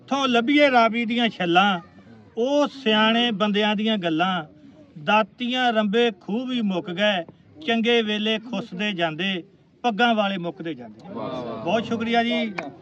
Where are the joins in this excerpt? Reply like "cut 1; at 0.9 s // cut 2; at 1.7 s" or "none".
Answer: none

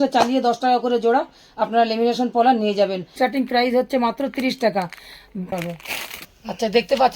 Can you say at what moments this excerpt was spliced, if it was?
cut 1; at 3.1 s // cut 2; at 5.5 s

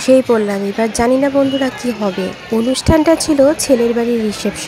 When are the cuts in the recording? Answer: none

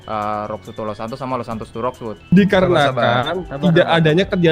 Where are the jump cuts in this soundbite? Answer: cut 1; at 2.3 s

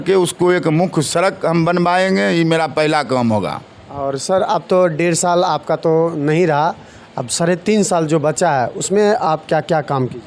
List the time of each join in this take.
none

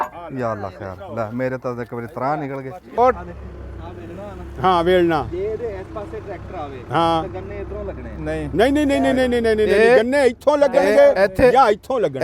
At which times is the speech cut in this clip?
cut 1; at 2.8 s

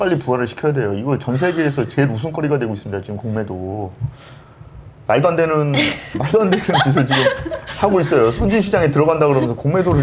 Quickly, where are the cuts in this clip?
none

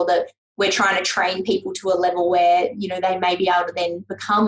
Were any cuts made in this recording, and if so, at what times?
none

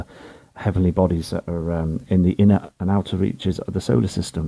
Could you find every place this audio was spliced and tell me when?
none

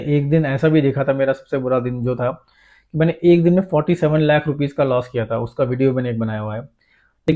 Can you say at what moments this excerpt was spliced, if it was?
none

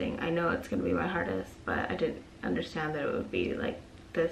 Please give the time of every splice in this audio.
none

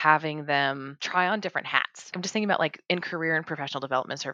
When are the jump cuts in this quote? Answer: cut 1; at 0.9 s // cut 2; at 2.2 s

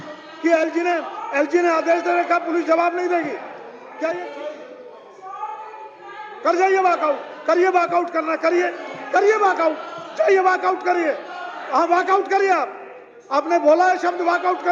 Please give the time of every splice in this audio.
cut 1; at 4.2 s

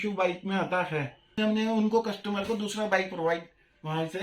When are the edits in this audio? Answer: cut 1; at 1.5 s

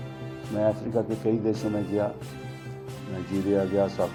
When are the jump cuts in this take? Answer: none

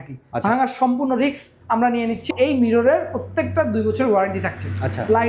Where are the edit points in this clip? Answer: cut 1; at 2.3 s

